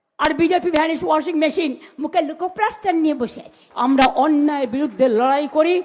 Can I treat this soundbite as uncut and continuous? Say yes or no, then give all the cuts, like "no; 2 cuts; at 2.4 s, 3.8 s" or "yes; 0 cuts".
no; 1 cut; at 3.6 s